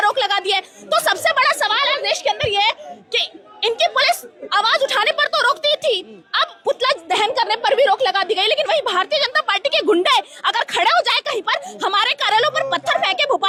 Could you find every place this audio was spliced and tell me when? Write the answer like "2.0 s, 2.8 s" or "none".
none